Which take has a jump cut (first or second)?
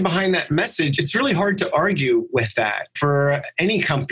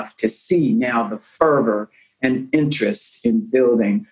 first